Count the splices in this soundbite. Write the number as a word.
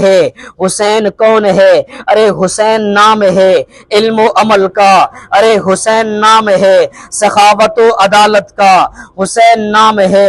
zero